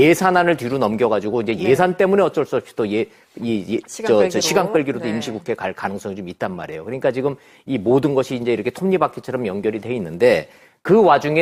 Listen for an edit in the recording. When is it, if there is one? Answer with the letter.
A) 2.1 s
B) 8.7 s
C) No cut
C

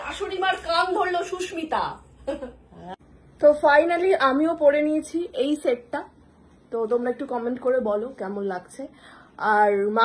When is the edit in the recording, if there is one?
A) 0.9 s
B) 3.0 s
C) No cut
B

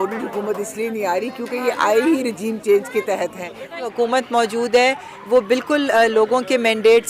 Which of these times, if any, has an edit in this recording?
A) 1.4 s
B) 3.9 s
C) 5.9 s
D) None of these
B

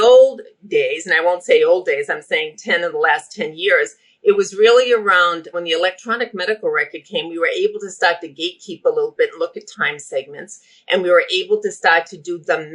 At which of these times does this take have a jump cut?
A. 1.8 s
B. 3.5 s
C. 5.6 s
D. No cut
C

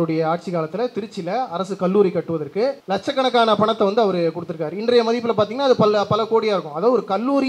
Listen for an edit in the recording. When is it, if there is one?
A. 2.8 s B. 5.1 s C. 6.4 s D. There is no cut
A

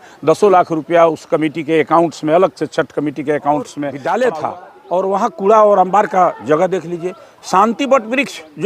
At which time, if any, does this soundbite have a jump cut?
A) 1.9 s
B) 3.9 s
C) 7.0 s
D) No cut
B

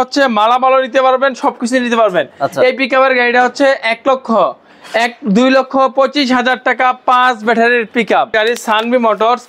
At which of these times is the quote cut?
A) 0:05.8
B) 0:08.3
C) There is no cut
B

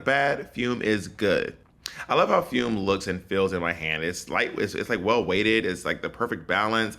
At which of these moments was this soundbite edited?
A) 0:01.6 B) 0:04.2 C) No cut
A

